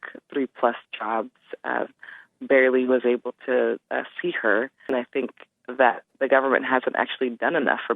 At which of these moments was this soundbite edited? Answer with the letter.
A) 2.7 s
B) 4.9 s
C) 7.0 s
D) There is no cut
B